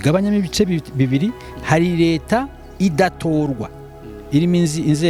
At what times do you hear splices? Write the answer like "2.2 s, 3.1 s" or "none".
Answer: none